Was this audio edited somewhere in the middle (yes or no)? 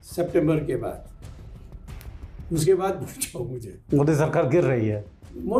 no